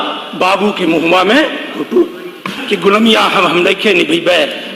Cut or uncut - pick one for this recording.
cut